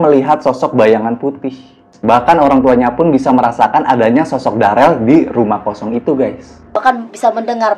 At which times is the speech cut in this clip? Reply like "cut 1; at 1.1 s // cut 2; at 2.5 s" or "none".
cut 1; at 1.9 s